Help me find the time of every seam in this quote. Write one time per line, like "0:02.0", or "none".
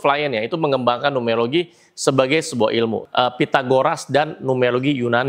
0:03.0